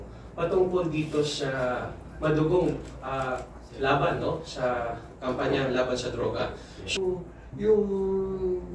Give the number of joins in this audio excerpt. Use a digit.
1